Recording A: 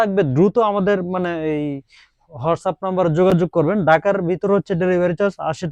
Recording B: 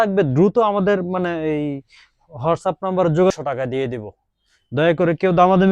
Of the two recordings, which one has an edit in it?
B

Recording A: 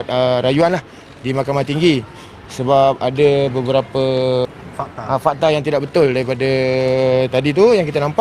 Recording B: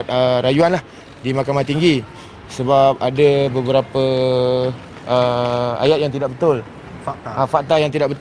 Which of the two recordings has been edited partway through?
A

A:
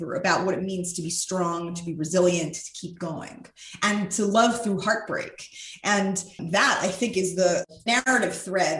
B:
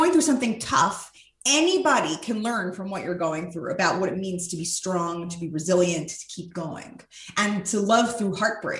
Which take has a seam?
A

